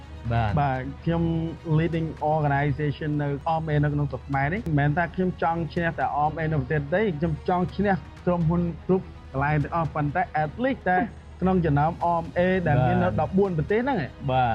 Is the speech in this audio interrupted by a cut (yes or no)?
yes